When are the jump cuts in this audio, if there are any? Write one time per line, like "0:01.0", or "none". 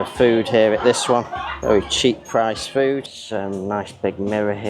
0:03.2